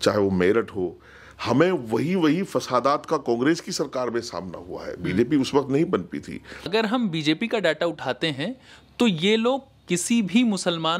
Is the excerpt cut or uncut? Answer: cut